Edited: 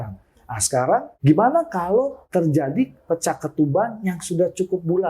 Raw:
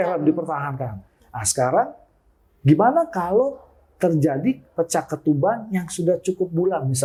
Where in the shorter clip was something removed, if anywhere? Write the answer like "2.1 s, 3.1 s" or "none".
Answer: 1.1 s, 2.2 s

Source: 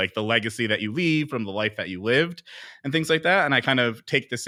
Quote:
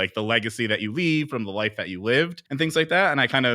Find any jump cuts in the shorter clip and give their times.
2.4 s

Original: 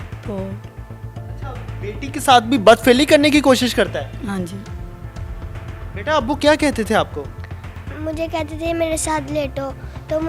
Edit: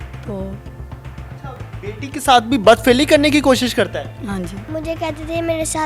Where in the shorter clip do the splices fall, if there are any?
4.6 s

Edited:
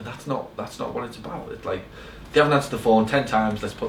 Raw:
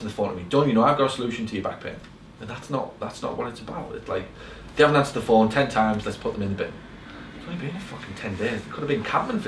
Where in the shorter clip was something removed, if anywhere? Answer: none

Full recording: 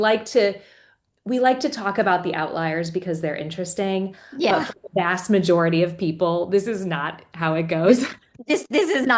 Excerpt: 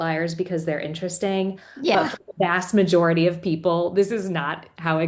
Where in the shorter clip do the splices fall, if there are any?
none

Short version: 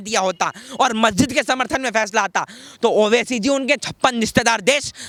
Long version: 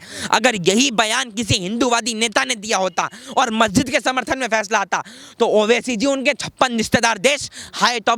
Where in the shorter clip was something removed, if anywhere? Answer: none

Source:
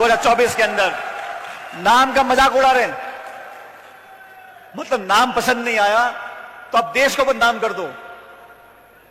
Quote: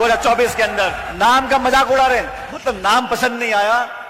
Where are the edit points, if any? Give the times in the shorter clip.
1.0 s, 2.4 s

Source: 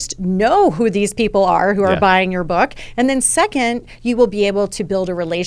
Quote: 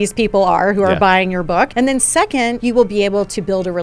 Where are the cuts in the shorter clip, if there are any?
1.7 s, 2.6 s

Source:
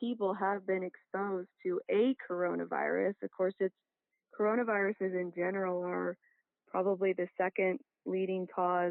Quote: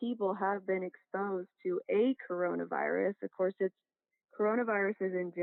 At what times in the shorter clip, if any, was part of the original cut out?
none

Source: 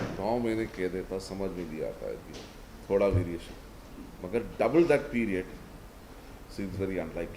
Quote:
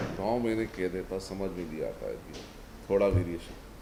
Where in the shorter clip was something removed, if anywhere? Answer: none

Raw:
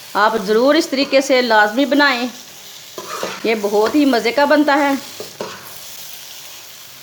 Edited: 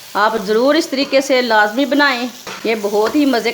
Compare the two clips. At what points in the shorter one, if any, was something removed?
2.4 s

